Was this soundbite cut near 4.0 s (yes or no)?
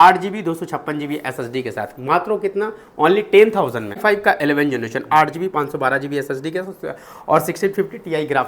yes